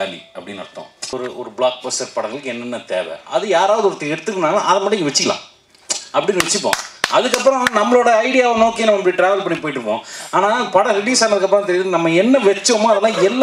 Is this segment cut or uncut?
cut